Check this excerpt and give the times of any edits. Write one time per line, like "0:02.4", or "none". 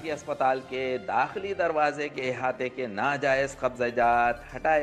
none